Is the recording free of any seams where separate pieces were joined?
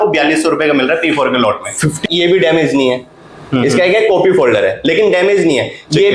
no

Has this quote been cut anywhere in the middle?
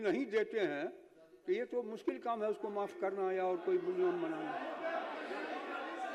no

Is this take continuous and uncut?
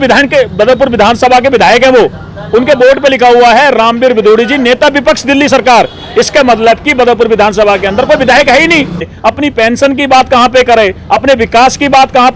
no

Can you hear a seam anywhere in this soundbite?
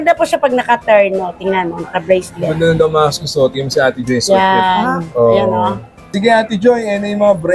yes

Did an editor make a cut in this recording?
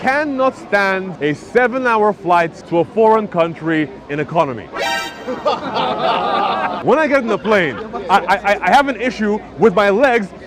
yes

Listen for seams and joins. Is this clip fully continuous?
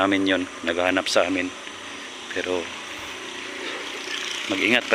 yes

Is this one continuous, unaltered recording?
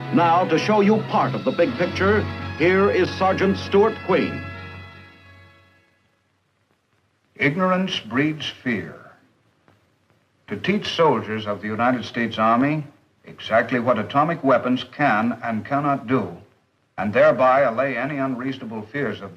no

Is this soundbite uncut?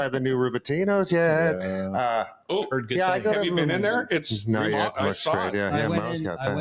yes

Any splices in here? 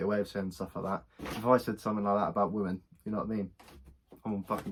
no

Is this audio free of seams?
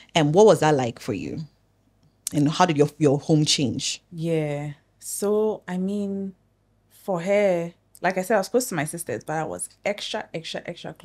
yes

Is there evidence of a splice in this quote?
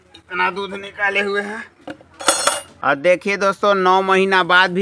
yes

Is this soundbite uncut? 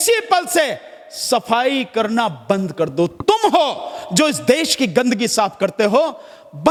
yes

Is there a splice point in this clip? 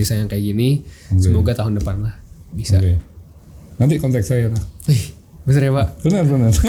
no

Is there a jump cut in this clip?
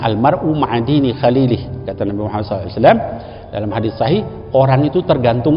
no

